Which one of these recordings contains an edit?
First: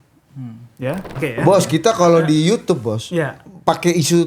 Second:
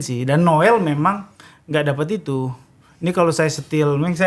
first; 1 cut; at 1.2 s

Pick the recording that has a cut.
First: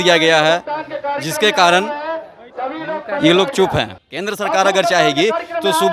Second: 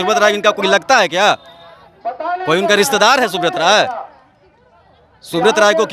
first; 1 cut; at 4.0 s

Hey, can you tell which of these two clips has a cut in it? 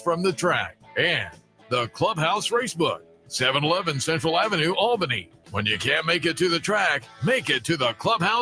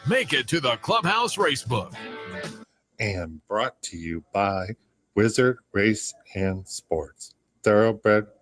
second; 1 cut; at 2.5 s

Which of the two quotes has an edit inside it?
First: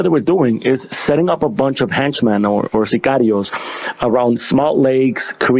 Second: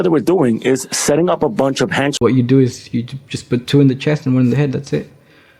second; 1 cut; at 2.1 s

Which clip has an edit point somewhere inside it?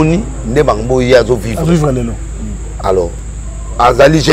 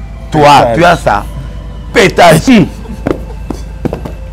second; 1 cut; at 2.4 s

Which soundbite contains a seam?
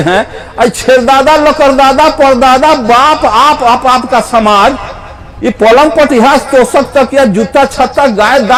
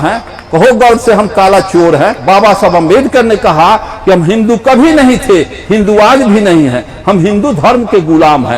second; 1 cut; at 2.2 s

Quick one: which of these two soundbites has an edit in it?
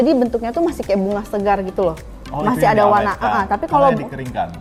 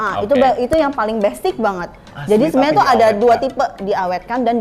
second; 1 cut; at 2.1 s

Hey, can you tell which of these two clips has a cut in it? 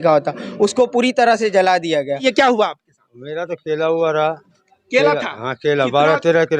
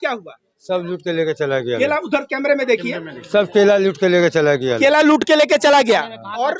first; 1 cut; at 2.2 s

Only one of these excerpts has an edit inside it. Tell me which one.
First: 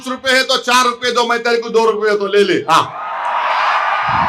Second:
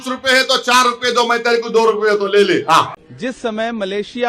second; 1 cut; at 3.0 s

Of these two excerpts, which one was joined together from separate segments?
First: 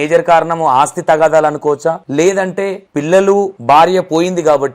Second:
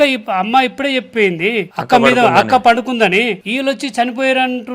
second; 2 cuts; at 1.7 s, 3.4 s

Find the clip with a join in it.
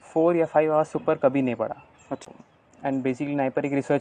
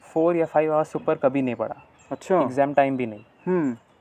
first; 1 cut; at 2.2 s

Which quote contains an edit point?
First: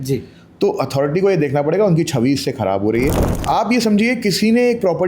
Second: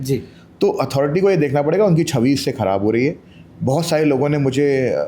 first; 1 cut; at 3.3 s

